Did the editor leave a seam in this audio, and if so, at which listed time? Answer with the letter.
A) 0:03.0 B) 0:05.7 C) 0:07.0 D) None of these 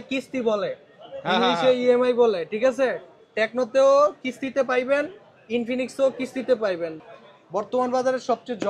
C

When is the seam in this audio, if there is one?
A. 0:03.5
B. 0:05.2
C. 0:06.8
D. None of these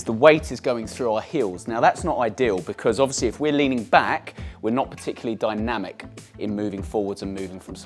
D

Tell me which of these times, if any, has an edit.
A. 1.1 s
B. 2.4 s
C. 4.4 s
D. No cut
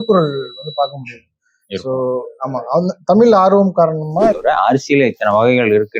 C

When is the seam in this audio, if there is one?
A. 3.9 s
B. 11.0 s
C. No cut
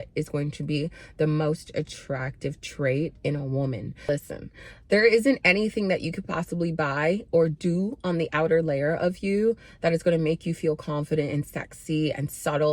A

